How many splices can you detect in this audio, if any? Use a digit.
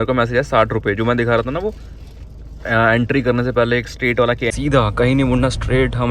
1